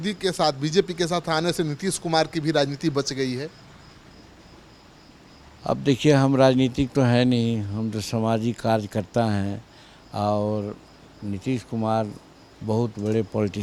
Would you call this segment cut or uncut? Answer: uncut